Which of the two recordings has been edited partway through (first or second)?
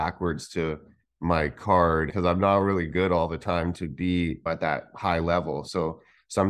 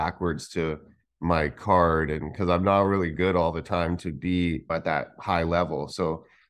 first